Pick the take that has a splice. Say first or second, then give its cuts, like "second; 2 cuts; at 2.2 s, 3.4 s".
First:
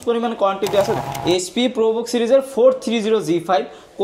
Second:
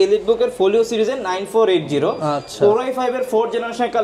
first; 1 cut; at 1.0 s